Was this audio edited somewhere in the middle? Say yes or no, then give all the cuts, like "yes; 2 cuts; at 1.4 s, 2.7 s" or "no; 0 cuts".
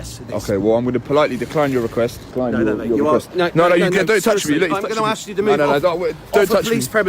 yes; 1 cut; at 2.3 s